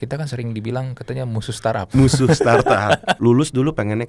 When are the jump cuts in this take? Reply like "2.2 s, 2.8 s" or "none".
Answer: 3.2 s